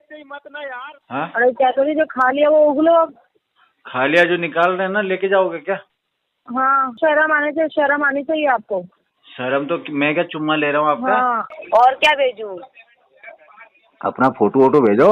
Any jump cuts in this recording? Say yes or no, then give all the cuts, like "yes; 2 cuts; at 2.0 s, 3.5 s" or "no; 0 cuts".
yes; 3 cuts; at 1.0 s, 7.0 s, 11.5 s